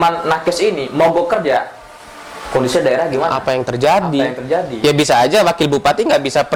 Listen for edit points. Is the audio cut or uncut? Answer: uncut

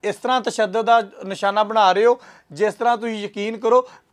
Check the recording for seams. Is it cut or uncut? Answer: uncut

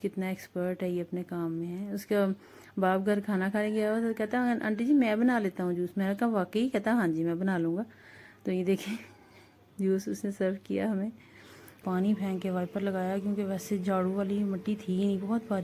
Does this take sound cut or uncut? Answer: cut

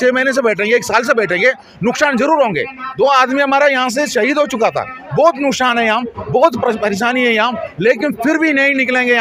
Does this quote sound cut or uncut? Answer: uncut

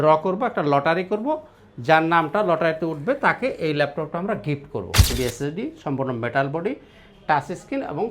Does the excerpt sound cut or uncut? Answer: cut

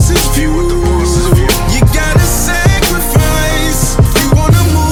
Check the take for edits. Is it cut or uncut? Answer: uncut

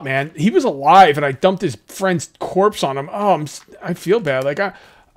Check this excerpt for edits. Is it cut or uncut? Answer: uncut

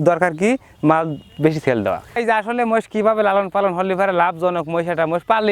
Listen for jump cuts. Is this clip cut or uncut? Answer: cut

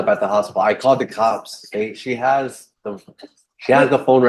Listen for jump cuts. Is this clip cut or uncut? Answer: uncut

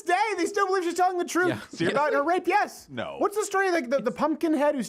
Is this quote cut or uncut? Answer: uncut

